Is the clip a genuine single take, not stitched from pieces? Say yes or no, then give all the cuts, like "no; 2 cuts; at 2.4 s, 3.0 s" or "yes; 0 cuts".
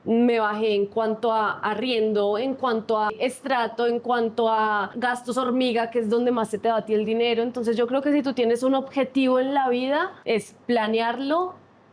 no; 3 cuts; at 3.1 s, 4.9 s, 10.2 s